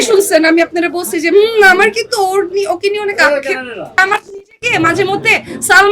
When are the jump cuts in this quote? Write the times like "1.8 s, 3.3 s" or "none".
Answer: 3.9 s